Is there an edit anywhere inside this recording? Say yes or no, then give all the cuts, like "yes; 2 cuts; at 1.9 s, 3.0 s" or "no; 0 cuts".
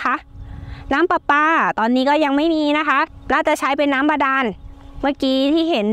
yes; 1 cut; at 3.1 s